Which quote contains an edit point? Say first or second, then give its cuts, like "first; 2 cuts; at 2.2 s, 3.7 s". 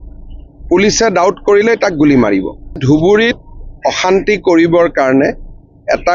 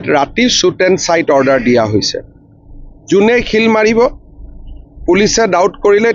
first; 1 cut; at 2.8 s